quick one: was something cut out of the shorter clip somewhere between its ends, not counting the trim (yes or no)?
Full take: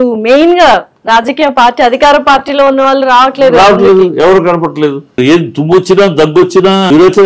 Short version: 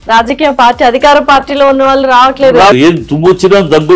yes